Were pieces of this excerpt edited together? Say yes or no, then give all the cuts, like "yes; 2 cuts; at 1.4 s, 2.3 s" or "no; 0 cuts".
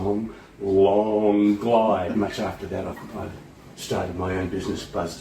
yes; 1 cut; at 2.2 s